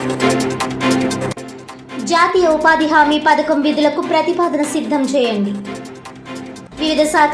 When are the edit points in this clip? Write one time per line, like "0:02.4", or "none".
0:01.2